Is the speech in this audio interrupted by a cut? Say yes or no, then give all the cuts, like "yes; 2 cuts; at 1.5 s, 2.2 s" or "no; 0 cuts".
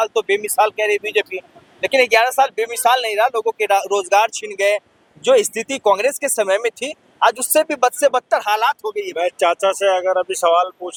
no; 0 cuts